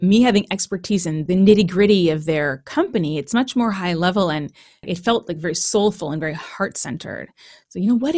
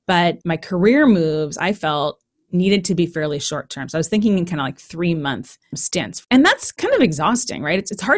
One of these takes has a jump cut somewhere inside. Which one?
second; 1 cut; at 6.2 s

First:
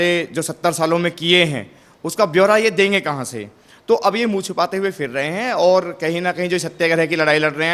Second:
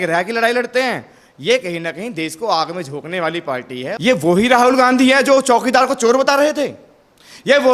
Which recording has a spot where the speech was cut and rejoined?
second; 1 cut; at 4.0 s

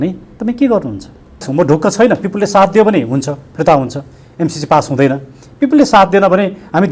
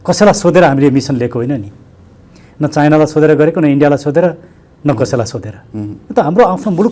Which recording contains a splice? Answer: first; 1 cut; at 1.5 s

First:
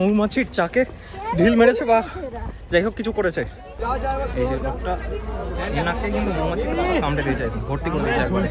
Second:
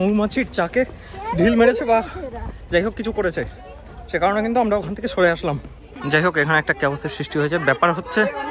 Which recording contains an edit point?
first; 1 cut; at 3.7 s

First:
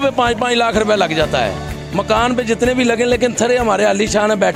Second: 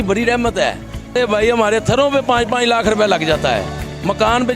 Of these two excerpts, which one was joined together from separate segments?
second; 1 cut; at 1.1 s

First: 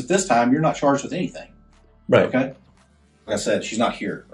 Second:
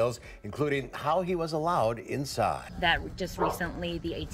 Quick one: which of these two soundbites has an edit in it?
second; 1 cut; at 2.6 s

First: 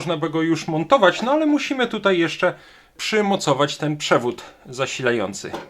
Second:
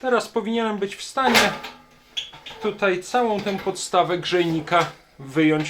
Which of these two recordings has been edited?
first; 1 cut; at 2.9 s

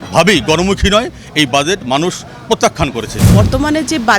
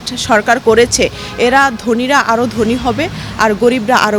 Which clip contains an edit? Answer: first; 1 cut; at 3.2 s

